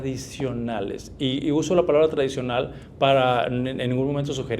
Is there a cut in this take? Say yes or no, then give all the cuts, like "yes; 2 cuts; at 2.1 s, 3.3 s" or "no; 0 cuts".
no; 0 cuts